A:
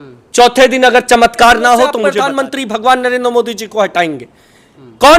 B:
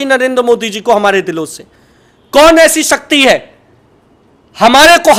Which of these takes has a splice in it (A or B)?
A